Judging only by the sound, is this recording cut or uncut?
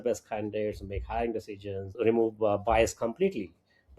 cut